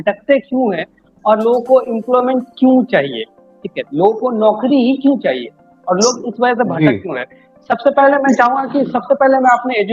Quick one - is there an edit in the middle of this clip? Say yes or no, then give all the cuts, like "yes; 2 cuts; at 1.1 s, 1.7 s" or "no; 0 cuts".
no; 0 cuts